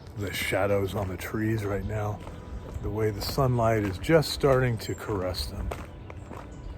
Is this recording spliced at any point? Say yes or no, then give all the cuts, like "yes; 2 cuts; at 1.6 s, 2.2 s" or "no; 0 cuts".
yes; 1 cut; at 2.7 s